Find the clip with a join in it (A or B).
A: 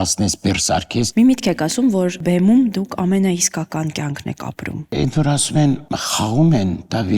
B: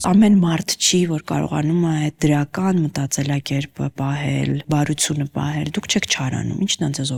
A